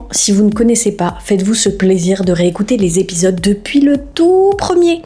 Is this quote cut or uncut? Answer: uncut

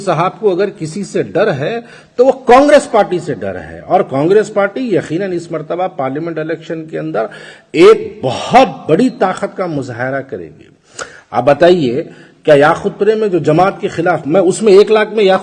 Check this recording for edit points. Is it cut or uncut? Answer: uncut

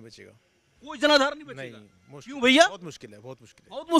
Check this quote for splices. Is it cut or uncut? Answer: uncut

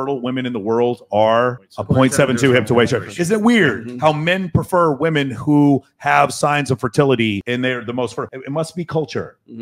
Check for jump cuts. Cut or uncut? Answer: uncut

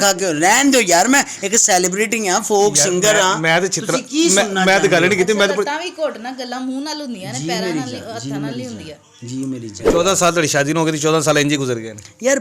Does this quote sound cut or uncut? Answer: cut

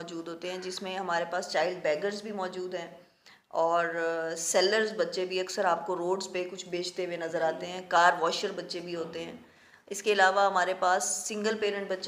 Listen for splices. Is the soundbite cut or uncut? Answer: uncut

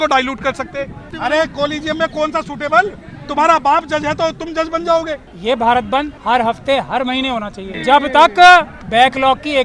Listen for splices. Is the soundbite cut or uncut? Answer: cut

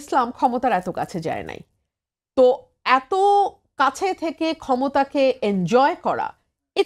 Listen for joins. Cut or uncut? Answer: uncut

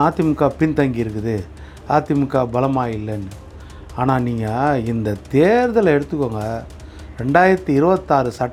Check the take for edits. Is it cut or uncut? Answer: uncut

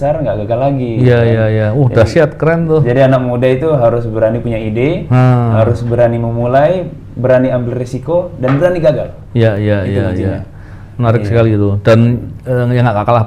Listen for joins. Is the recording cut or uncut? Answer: uncut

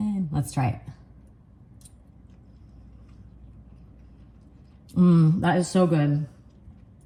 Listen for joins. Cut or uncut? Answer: uncut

